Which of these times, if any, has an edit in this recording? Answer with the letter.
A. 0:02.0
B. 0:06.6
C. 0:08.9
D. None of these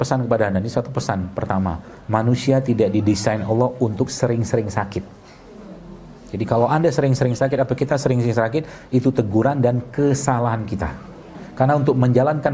D